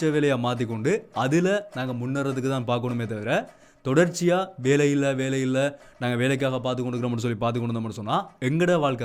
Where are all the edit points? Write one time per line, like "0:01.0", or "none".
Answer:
none